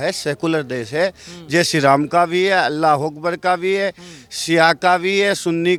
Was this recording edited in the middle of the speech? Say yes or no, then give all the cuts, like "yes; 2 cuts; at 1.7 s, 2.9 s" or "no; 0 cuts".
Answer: no; 0 cuts